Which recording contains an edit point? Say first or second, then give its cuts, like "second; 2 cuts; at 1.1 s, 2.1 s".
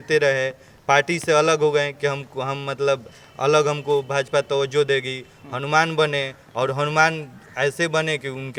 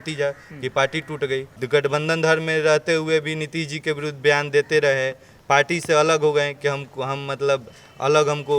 second; 1 cut; at 1.5 s